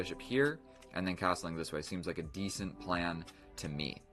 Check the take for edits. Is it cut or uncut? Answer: cut